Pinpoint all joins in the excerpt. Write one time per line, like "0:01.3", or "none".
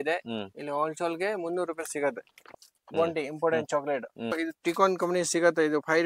0:02.7
0:04.4